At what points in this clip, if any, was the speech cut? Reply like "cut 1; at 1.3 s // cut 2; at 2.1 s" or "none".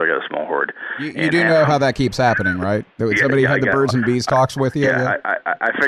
cut 1; at 2.9 s